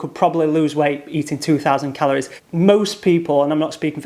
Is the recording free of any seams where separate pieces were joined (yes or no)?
no